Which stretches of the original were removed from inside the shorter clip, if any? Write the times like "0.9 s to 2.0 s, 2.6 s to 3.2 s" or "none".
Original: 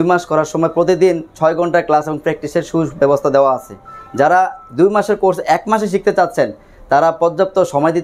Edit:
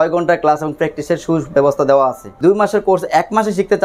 3.7 s to 4.6 s